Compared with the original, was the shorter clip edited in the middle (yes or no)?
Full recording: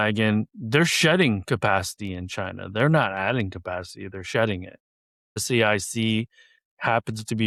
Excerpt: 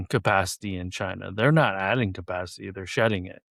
no